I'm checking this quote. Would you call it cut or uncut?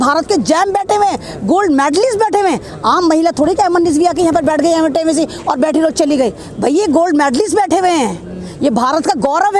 uncut